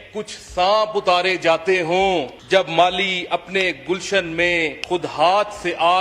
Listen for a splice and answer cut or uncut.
cut